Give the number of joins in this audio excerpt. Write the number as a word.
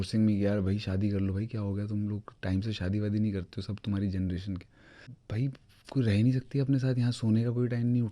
one